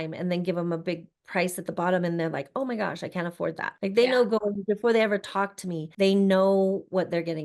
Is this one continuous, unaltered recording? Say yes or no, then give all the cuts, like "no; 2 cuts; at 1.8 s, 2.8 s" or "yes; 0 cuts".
no; 2 cuts; at 3.7 s, 5.9 s